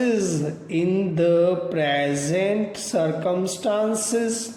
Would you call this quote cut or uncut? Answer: uncut